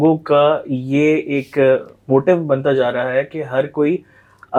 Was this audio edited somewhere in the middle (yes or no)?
no